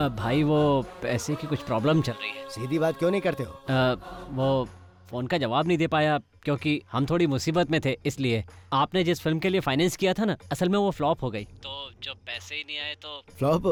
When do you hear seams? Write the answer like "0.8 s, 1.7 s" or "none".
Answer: none